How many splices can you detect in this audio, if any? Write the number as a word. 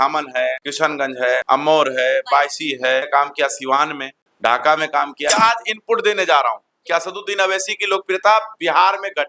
three